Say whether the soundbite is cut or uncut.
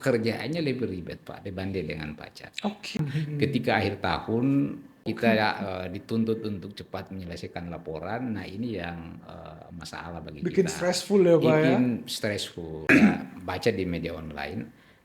cut